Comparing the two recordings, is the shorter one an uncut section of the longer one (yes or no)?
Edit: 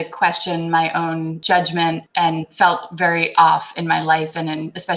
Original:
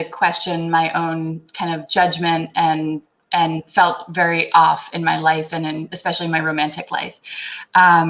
no